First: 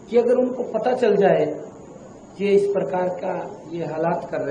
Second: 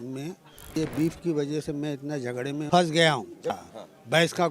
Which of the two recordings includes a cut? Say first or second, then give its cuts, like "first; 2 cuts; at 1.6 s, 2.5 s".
second; 3 cuts; at 0.8 s, 2.7 s, 3.6 s